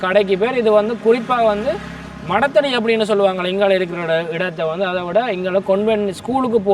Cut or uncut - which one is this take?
uncut